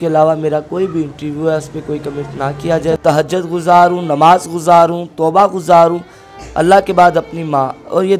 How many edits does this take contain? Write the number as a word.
one